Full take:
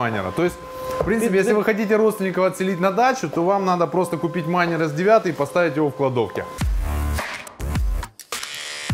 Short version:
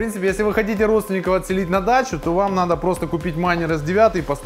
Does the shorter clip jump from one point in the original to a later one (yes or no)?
no